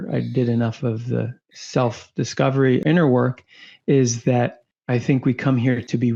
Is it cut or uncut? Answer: uncut